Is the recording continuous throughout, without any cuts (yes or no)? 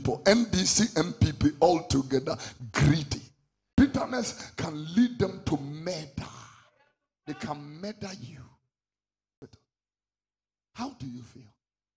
no